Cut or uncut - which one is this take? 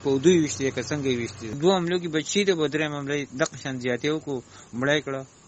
cut